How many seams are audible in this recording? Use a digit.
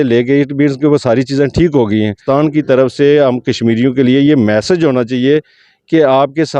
1